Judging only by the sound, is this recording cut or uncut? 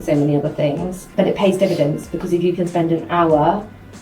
cut